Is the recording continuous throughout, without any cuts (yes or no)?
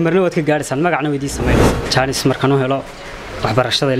no